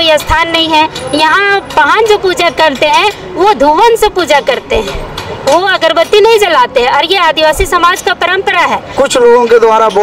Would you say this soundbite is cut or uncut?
cut